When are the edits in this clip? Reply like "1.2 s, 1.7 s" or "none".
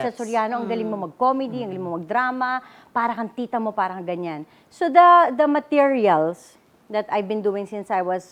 none